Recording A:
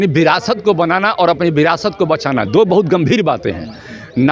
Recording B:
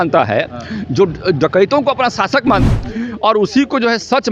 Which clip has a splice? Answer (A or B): B